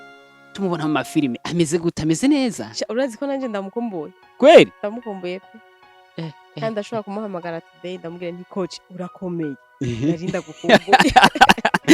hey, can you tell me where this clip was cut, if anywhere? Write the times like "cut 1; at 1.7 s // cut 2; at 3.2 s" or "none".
none